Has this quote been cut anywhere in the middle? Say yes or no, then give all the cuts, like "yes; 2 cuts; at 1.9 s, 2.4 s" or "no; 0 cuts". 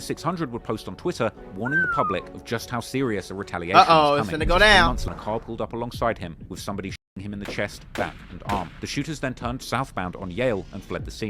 yes; 1 cut; at 5.0 s